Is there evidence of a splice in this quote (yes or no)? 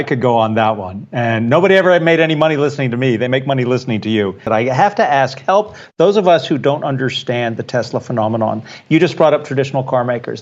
yes